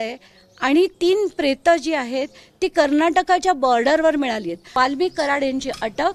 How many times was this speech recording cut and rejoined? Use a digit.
1